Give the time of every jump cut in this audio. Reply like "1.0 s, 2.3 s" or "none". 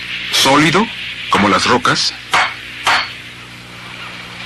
1.4 s

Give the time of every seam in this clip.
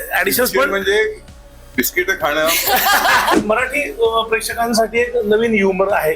3.4 s

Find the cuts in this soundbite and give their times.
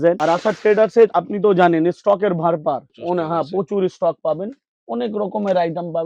none

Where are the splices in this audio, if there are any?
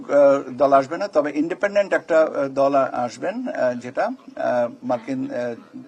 none

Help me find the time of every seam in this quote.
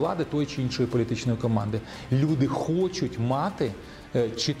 1.9 s

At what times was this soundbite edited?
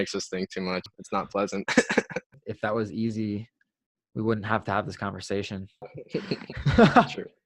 1.0 s, 2.3 s, 5.9 s

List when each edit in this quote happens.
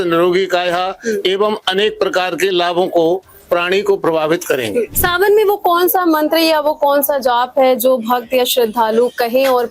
5.0 s

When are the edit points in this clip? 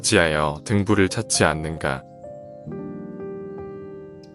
2.3 s

